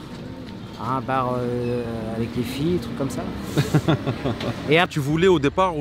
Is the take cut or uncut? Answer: cut